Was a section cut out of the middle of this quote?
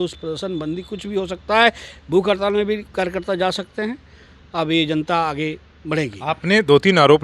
no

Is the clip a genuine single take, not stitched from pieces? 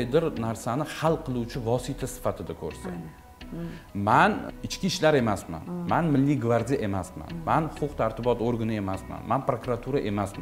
yes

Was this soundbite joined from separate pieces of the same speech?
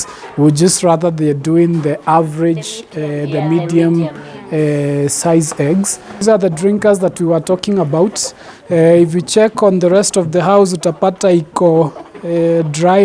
yes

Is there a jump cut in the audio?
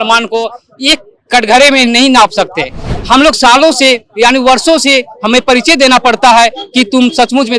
yes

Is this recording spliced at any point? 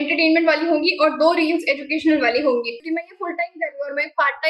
yes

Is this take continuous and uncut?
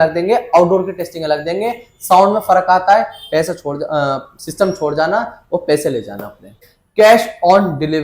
no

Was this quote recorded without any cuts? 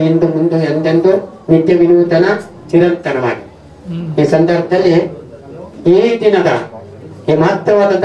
yes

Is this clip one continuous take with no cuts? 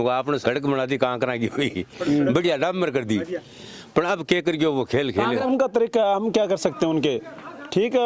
no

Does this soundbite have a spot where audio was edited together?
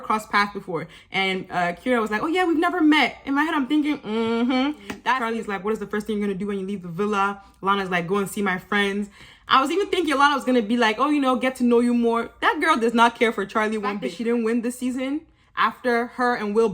yes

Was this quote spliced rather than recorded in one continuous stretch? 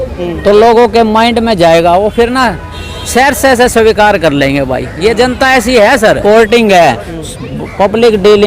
yes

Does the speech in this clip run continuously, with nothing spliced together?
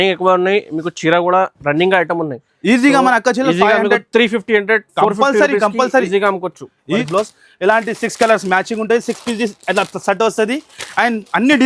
no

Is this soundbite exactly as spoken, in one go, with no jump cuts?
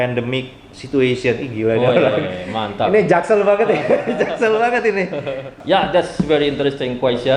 no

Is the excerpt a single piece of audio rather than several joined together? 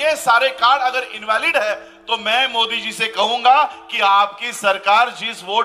yes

